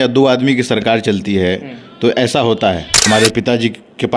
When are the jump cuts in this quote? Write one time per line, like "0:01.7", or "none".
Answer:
0:02.9